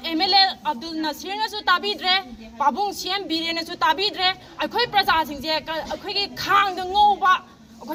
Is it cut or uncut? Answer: uncut